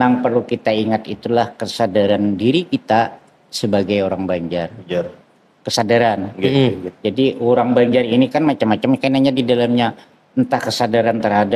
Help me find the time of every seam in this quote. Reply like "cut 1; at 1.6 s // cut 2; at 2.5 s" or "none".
none